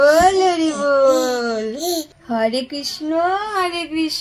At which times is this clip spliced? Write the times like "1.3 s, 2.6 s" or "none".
2.2 s